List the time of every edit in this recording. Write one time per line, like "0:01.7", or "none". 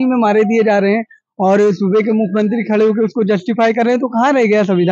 none